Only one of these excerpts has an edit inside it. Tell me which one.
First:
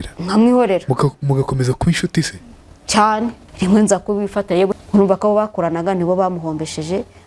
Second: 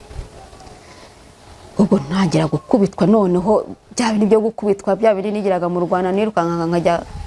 first; 2 cuts; at 3.4 s, 4.7 s

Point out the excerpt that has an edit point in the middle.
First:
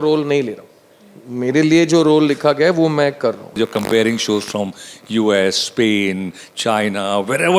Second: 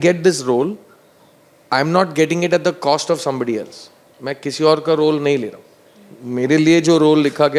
first; 1 cut; at 3.6 s

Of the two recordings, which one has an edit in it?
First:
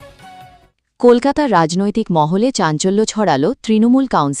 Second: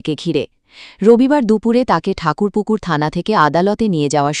first; 1 cut; at 1.0 s

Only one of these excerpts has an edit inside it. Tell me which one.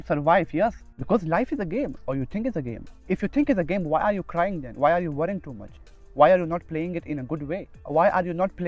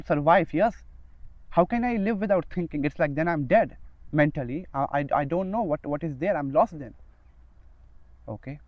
first; 3 cuts; at 0.9 s, 3.0 s, 7.8 s

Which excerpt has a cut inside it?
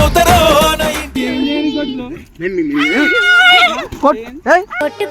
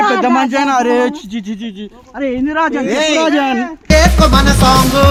first; 1 cut; at 1.2 s

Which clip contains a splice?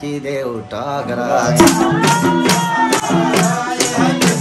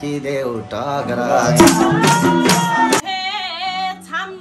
second; 1 cut; at 3.0 s

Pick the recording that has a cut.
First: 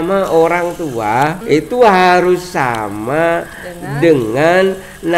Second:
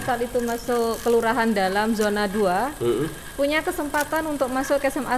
first; 1 cut; at 1.4 s

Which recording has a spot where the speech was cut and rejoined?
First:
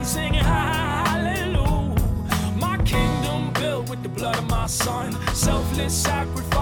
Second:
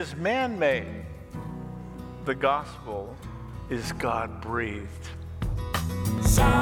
second; 1 cut; at 5.4 s

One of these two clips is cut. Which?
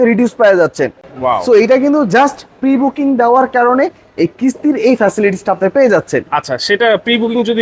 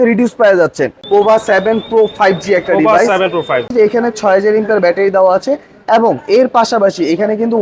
second; 2 cuts; at 0.9 s, 3.7 s

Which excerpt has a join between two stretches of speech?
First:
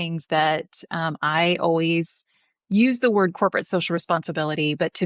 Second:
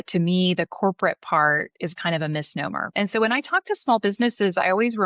second; 1 cut; at 2.8 s

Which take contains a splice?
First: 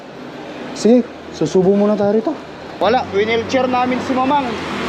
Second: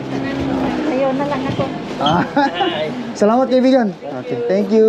first; 1 cut; at 2.7 s

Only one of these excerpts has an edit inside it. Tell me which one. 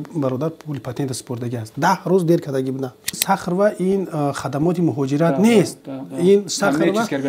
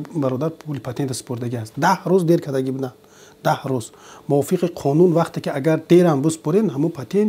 first; 1 cut; at 3.2 s

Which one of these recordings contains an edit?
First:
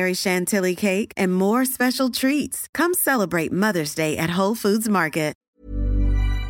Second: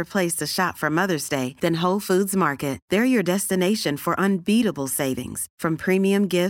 first; 1 cut; at 5.4 s

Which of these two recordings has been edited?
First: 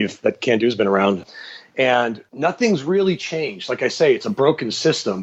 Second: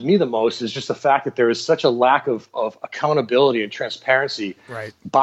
first; 2 cuts; at 1.2 s, 2.2 s

